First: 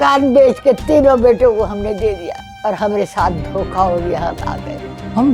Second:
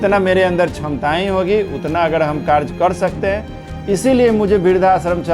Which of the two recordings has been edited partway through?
first; 1 cut; at 2.5 s

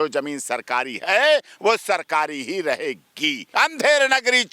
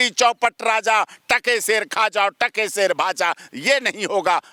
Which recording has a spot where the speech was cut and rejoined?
first; 1 cut; at 3.4 s

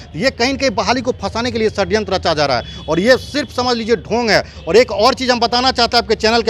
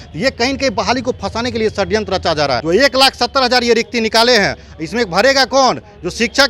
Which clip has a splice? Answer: second; 1 cut; at 2.6 s

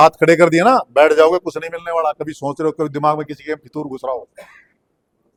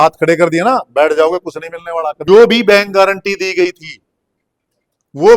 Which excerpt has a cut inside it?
second; 1 cut; at 2.1 s

